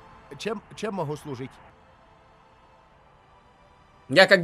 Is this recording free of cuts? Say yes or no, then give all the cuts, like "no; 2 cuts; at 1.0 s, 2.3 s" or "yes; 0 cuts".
no; 1 cut; at 1.7 s